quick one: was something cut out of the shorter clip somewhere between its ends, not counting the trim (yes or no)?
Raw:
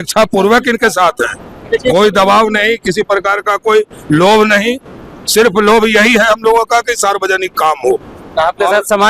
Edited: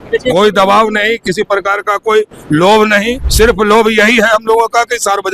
yes